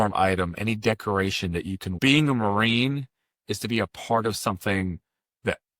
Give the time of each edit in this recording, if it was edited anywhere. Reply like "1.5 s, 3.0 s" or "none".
1.9 s